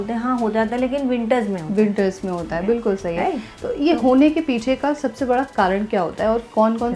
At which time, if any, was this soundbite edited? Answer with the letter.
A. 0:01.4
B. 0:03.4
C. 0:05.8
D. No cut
D